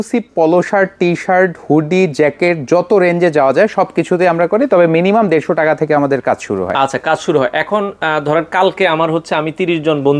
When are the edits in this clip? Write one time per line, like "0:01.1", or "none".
none